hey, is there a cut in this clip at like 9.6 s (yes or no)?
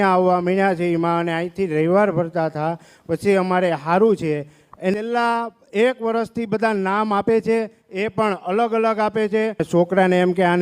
yes